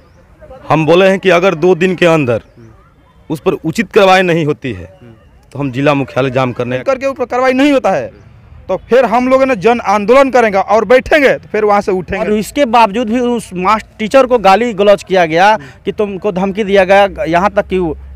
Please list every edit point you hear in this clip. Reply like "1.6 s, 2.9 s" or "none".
6.7 s, 12.3 s